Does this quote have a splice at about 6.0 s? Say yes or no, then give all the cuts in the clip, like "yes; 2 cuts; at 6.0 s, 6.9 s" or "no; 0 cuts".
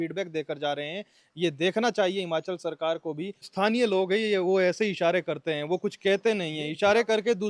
no; 1 cut; at 3.5 s